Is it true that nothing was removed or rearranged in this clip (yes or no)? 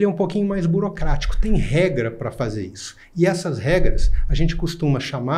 yes